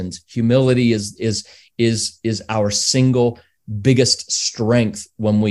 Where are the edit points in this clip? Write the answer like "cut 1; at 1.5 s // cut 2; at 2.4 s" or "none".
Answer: none